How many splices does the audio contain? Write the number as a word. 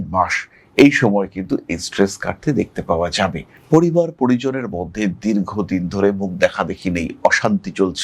one